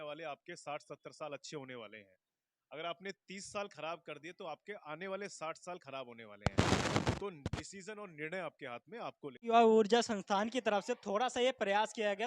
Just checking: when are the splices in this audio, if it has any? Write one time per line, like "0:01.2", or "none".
0:09.5